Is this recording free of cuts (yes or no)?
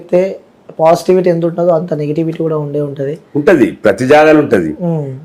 yes